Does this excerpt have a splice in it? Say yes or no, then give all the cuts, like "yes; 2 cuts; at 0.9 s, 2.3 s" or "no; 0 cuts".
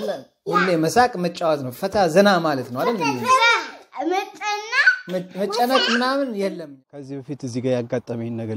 yes; 1 cut; at 6.6 s